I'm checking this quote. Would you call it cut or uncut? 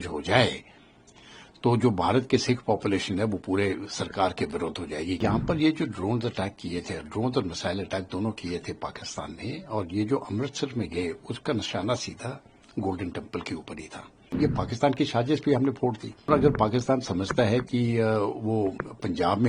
cut